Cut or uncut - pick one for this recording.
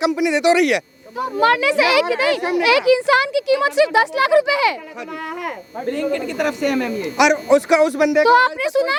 uncut